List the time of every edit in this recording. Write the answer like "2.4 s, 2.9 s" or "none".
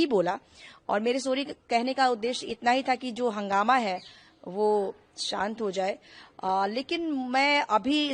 none